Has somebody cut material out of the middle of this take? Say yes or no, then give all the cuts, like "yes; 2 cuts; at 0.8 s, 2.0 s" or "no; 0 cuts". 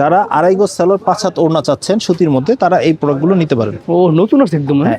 yes; 1 cut; at 3.7 s